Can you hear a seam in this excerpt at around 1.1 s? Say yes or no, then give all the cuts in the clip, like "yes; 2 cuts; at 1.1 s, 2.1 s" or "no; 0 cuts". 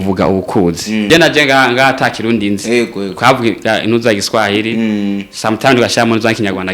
yes; 1 cut; at 1.1 s